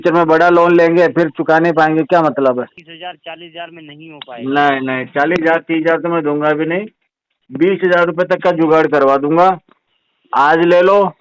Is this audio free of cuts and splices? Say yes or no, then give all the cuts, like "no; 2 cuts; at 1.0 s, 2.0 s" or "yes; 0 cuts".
no; 1 cut; at 2.8 s